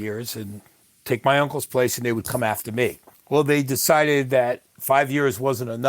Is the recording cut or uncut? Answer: cut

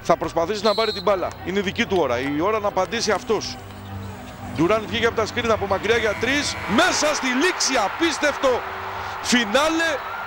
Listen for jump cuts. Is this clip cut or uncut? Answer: uncut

